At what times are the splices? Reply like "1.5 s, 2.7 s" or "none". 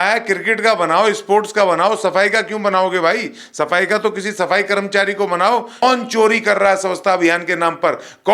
5.8 s